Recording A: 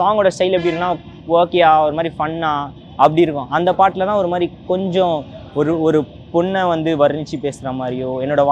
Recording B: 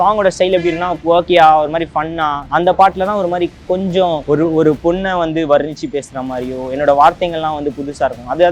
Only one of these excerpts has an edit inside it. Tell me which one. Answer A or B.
B